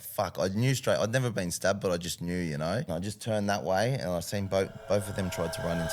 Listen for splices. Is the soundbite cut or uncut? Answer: cut